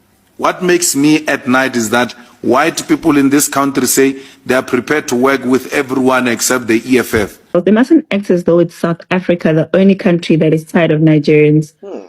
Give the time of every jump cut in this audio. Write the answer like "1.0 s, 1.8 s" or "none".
7.5 s